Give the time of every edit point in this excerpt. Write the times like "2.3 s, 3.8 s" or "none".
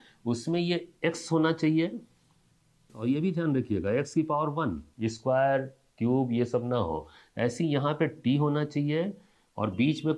2.9 s